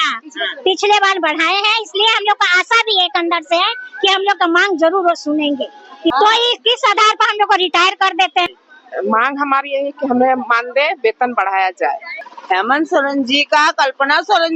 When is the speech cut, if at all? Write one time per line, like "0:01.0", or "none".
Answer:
0:06.1
0:08.5
0:12.1